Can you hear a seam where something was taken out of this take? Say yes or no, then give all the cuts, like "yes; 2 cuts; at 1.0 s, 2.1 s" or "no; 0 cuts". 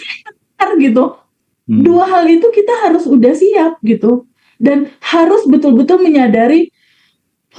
yes; 1 cut; at 1.3 s